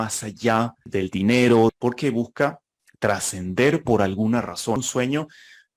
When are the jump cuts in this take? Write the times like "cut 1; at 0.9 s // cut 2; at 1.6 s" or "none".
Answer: cut 1; at 0.8 s // cut 2; at 1.8 s // cut 3; at 4.8 s